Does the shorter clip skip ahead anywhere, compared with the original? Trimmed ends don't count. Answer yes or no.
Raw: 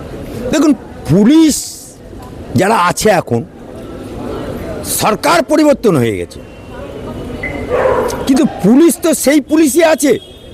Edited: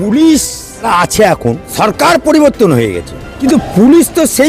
yes